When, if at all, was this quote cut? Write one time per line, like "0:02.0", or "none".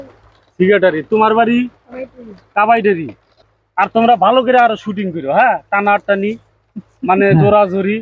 0:03.3